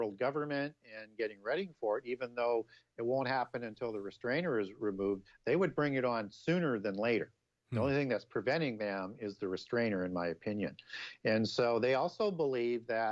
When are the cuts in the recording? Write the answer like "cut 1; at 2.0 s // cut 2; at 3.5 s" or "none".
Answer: cut 1; at 7.2 s